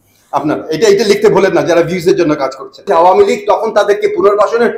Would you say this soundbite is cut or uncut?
cut